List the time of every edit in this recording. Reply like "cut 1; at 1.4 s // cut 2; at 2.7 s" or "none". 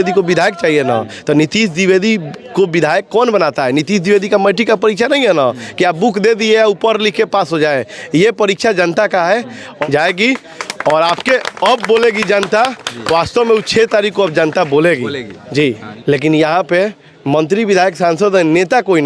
cut 1; at 9.7 s // cut 2; at 15.9 s